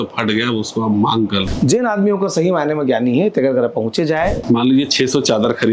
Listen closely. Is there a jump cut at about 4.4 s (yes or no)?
yes